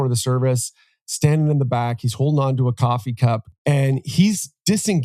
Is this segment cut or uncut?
cut